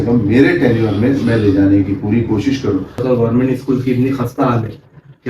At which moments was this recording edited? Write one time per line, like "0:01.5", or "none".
0:03.0